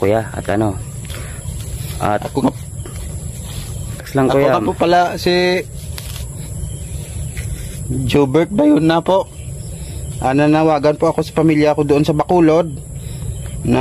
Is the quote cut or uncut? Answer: cut